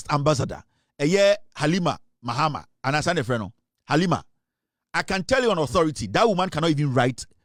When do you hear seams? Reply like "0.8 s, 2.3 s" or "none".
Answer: none